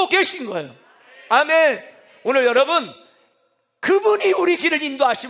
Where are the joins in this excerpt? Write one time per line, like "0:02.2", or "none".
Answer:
none